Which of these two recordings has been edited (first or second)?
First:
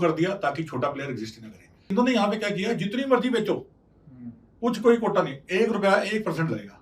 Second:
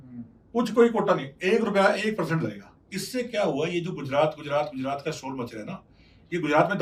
first